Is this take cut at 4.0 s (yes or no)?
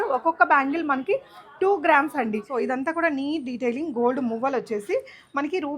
no